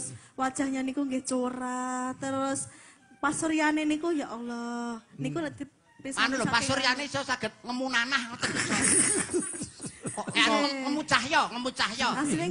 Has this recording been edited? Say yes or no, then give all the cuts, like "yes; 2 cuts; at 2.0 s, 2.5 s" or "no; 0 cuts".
no; 0 cuts